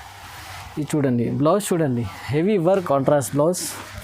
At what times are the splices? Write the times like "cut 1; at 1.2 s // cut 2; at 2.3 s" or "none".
cut 1; at 2.8 s

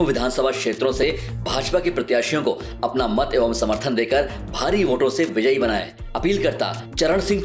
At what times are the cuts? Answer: none

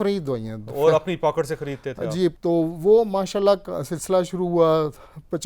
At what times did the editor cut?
cut 1; at 2.4 s

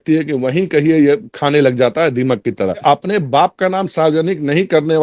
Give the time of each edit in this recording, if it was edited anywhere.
cut 1; at 2.8 s

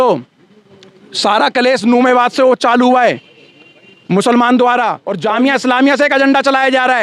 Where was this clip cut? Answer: cut 1; at 5.1 s

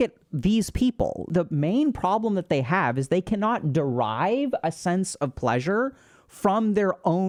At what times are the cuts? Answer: none

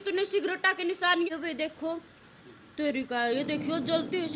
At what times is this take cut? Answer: cut 1; at 1.3 s

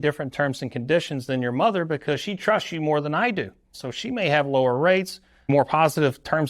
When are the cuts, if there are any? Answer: cut 1; at 3.8 s // cut 2; at 5.4 s

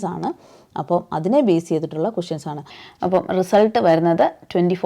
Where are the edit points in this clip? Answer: cut 1; at 2.8 s

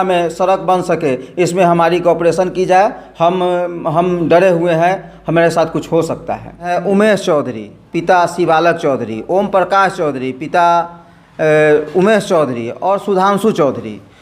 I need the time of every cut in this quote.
cut 1; at 6.7 s

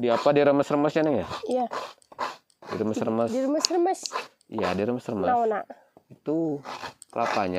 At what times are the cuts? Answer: none

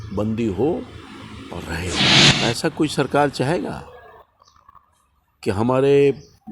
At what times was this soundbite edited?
cut 1; at 2.3 s

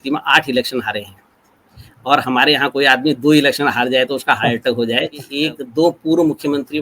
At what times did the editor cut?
cut 1; at 5.2 s

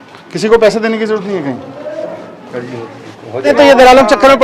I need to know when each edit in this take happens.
cut 1; at 3.5 s

